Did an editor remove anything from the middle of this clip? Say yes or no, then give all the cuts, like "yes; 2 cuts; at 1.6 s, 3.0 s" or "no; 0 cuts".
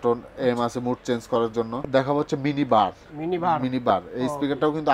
yes; 1 cut; at 1.8 s